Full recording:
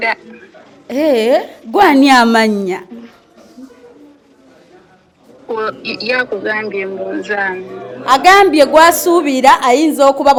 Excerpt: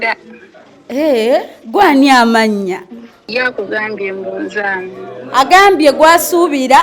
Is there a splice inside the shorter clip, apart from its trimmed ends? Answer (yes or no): yes